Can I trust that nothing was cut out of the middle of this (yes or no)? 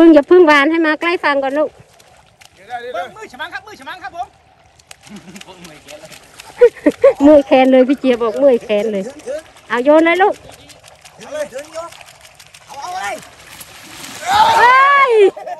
no